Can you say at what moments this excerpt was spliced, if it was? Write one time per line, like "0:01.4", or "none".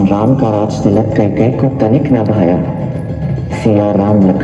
none